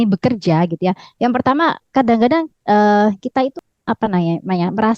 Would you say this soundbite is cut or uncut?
cut